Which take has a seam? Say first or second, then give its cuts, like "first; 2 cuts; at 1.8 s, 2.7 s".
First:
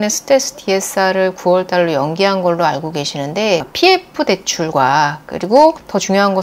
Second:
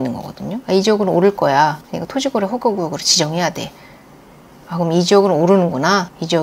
first; 1 cut; at 3.7 s